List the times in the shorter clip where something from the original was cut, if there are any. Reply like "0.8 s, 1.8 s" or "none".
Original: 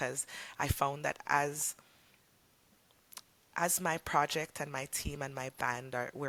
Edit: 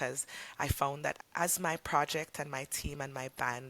1.2 s